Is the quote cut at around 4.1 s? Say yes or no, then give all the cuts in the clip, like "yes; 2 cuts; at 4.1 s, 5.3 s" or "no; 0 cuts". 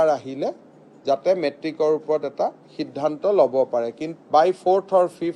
yes; 1 cut; at 4.1 s